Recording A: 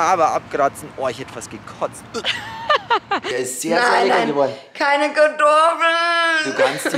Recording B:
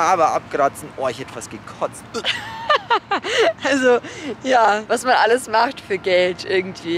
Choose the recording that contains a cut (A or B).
A